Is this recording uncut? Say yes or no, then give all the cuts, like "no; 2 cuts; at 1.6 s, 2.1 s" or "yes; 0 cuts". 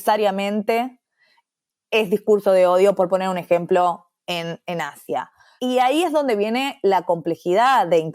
no; 1 cut; at 5.2 s